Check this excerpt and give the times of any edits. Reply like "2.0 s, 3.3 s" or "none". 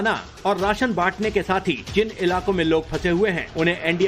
1.8 s